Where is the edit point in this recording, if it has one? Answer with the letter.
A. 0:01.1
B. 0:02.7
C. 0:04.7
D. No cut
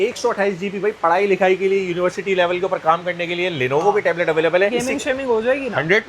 C